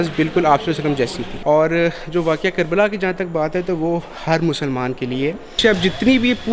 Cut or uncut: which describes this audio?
cut